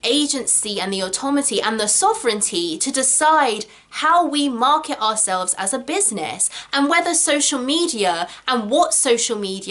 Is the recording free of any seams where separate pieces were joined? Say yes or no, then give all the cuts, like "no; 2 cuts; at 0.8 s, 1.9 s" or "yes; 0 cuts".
yes; 0 cuts